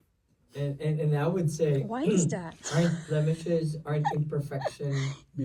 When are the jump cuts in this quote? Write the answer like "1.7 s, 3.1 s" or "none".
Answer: none

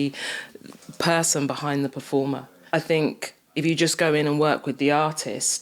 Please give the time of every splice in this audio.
2.5 s

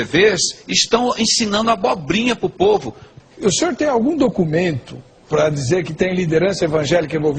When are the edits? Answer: none

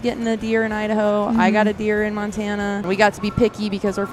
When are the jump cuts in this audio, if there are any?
2.8 s

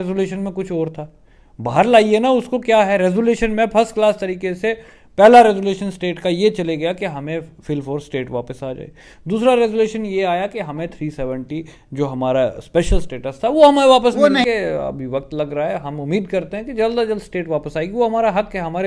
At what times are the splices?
14.4 s

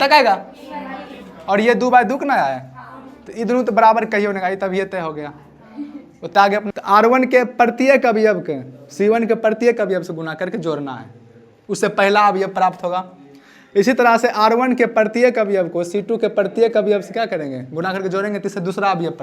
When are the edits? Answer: 6.7 s

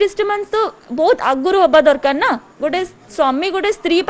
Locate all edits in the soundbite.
2.5 s

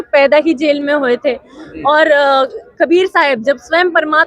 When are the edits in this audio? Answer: none

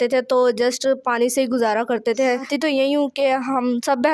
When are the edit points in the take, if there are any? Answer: 2.5 s

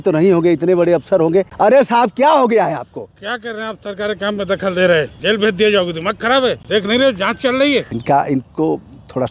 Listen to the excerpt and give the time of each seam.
1.5 s, 5.1 s, 6.6 s, 7.9 s

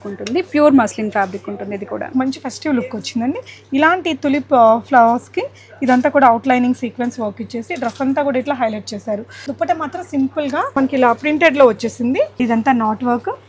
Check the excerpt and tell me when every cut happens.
2.1 s, 9.4 s, 10.8 s, 12.4 s

